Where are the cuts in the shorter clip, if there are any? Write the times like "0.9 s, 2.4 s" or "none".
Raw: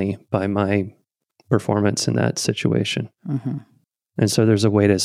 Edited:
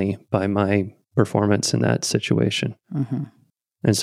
1.0 s

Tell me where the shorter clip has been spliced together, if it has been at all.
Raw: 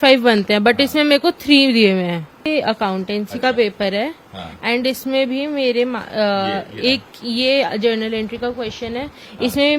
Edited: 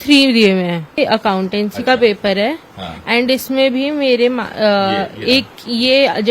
1.0 s

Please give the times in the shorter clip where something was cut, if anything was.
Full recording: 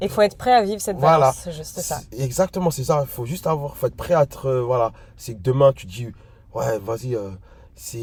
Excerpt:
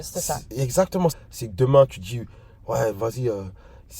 1.2 s

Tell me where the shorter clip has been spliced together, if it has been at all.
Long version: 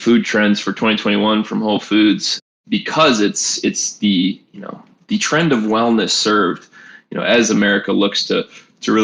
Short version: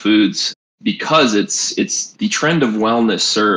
2.0 s

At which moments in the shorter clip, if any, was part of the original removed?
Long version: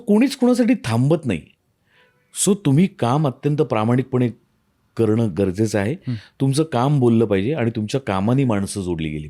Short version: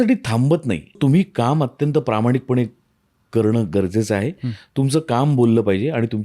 1.0 s

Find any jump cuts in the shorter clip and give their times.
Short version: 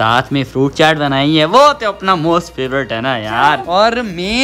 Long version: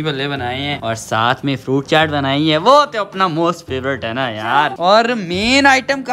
none

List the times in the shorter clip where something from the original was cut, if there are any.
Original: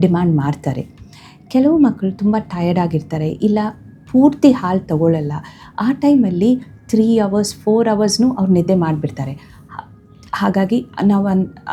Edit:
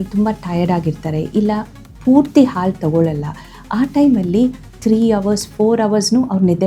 none

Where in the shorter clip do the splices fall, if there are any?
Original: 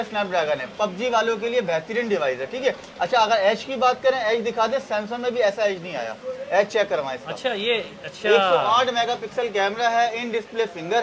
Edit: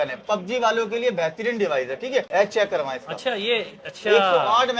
2.3 s

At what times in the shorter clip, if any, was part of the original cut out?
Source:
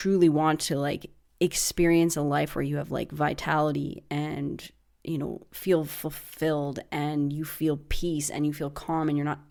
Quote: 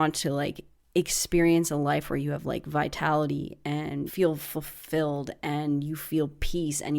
4.1 s

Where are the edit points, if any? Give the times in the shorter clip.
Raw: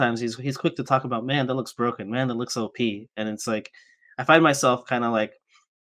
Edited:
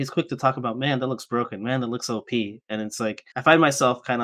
3.3 s

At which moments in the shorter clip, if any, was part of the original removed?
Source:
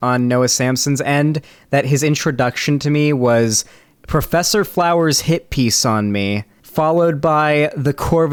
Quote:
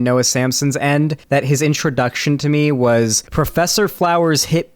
1.2 s, 3.2 s

